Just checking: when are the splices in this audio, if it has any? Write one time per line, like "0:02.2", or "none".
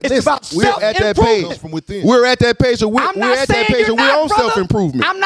none